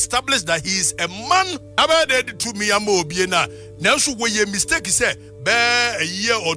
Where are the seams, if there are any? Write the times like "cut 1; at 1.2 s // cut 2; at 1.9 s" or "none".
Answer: cut 1; at 1.7 s